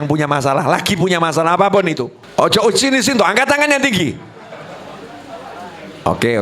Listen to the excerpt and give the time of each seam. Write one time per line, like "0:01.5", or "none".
0:02.2